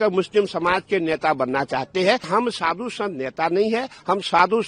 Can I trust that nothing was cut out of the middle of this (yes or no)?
no